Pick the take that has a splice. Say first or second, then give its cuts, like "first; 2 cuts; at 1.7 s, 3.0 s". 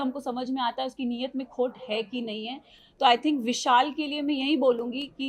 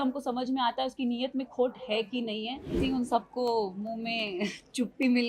second; 1 cut; at 2.8 s